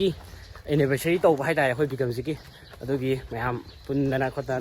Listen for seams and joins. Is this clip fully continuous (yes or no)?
yes